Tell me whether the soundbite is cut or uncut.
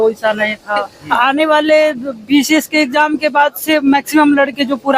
cut